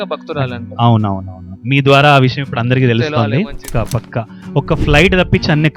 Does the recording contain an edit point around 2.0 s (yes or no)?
no